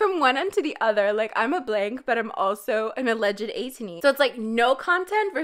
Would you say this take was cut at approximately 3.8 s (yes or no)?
yes